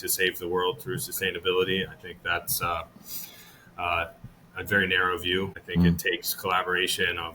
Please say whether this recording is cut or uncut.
cut